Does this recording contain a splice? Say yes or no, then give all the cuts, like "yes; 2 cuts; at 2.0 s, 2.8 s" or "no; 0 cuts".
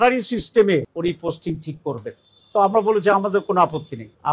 no; 0 cuts